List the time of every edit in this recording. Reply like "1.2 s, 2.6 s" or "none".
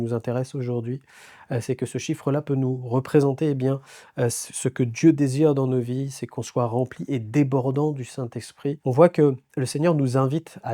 8.8 s